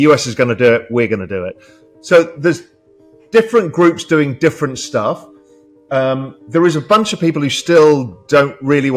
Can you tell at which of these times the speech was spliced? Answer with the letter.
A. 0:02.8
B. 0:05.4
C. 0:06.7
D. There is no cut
D